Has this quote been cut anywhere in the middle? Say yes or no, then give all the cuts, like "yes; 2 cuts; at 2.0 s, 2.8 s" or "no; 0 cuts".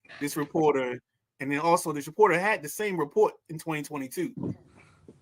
no; 0 cuts